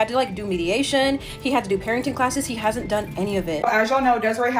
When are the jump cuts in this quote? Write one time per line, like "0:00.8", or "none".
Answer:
0:03.6